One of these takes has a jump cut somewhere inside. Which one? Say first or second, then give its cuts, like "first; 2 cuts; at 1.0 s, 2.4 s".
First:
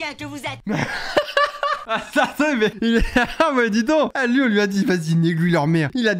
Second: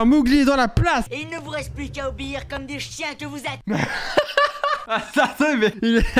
second; 1 cut; at 1.1 s